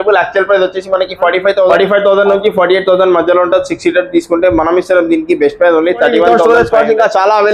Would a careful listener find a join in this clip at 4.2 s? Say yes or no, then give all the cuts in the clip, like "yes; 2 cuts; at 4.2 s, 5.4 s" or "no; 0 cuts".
no; 2 cuts; at 1.7 s, 6.3 s